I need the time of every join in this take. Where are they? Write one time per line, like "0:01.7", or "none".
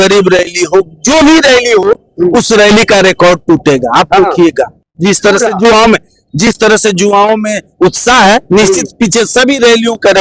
none